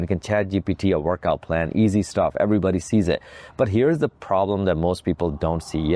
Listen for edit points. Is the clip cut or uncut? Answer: uncut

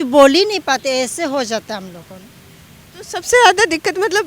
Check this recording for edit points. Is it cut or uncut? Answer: uncut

